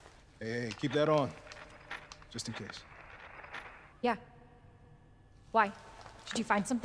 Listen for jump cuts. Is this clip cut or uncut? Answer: cut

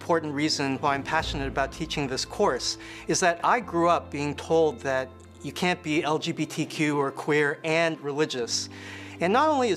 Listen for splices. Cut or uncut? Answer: uncut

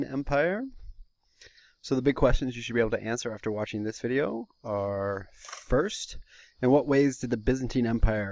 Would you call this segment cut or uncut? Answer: cut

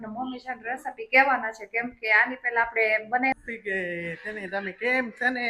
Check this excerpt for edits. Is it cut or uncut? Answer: cut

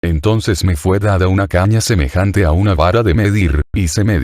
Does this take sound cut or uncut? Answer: cut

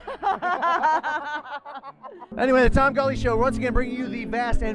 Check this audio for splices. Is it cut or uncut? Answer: cut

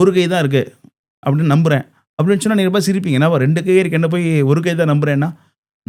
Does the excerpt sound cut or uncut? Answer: uncut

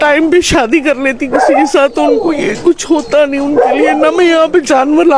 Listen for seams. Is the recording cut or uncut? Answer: uncut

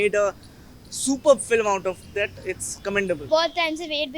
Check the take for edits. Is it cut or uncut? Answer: cut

